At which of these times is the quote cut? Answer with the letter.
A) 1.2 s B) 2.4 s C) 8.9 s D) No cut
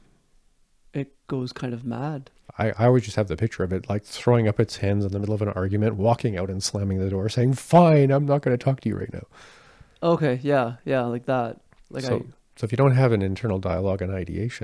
B